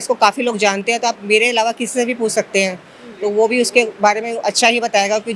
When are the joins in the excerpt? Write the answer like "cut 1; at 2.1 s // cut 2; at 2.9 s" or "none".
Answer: none